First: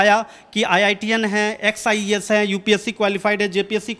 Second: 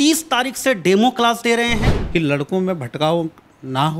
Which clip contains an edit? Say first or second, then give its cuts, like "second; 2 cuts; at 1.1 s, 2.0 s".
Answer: second; 1 cut; at 1.9 s